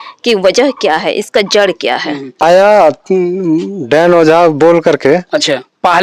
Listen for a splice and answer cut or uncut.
cut